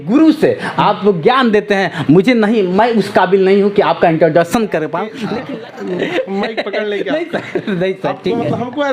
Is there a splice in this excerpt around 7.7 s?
no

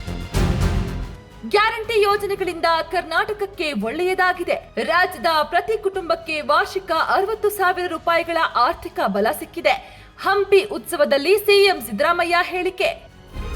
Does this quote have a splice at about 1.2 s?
yes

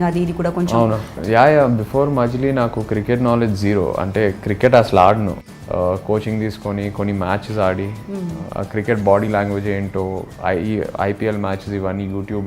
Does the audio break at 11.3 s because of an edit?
no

